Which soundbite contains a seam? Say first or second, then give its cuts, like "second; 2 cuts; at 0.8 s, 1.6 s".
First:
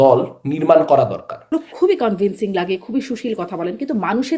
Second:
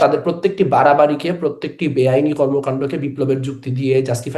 first; 1 cut; at 1.5 s